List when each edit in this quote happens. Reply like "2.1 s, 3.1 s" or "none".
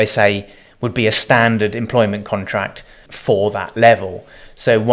3.0 s